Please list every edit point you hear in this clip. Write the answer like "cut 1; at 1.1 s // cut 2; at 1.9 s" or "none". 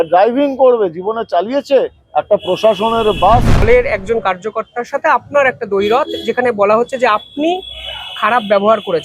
cut 1; at 3.7 s